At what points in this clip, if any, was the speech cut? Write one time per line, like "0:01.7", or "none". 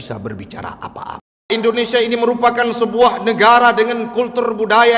0:01.5